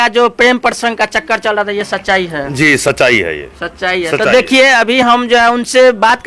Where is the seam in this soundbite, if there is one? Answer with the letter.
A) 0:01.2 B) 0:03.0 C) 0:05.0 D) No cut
D